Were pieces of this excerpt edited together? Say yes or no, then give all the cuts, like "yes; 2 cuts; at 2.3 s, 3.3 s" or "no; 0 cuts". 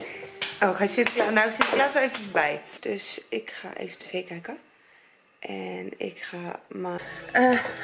yes; 2 cuts; at 2.7 s, 7.0 s